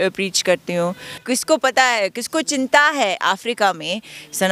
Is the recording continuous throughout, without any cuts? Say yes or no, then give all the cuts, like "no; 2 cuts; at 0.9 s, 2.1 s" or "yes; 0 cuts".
no; 1 cut; at 1.1 s